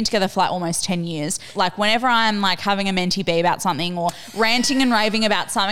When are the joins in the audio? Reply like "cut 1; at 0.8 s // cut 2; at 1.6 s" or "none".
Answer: cut 1; at 1.5 s